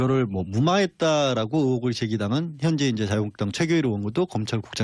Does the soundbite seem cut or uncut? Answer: uncut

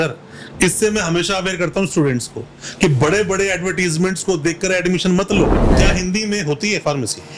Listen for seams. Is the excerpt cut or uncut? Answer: cut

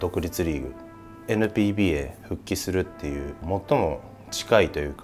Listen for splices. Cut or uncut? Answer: cut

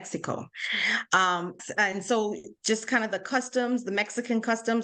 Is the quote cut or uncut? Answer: cut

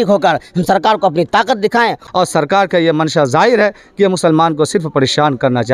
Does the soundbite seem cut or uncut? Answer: cut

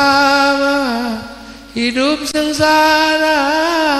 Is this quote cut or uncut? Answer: uncut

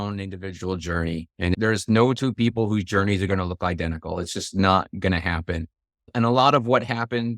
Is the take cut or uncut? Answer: cut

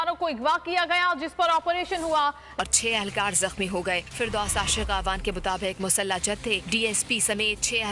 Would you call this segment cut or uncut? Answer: cut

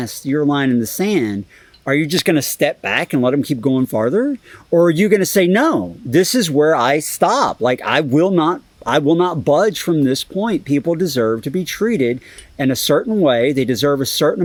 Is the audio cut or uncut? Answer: uncut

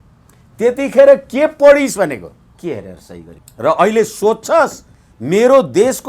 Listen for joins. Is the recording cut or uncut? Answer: cut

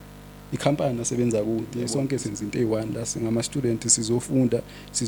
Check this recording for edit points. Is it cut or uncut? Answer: cut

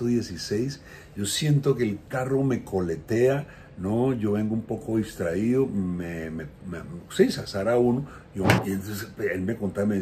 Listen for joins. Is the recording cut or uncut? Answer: cut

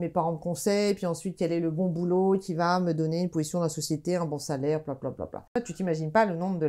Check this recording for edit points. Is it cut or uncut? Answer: cut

